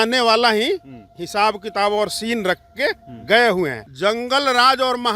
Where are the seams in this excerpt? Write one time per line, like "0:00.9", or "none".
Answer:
0:03.8